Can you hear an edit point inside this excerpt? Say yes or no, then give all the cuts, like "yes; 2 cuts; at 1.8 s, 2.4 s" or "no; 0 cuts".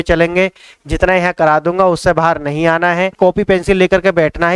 yes; 1 cut; at 3.1 s